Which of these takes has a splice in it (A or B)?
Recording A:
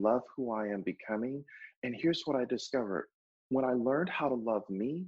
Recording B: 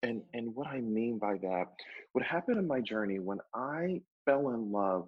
B